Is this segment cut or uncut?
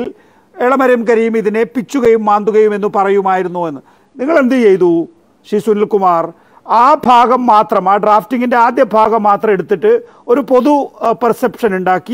uncut